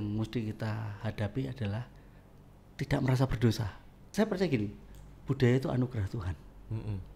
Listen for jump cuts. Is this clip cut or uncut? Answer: cut